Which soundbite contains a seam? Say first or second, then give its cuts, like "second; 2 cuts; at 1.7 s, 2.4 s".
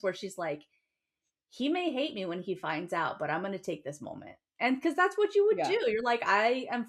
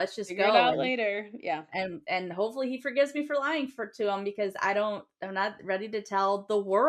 second; 1 cut; at 5.1 s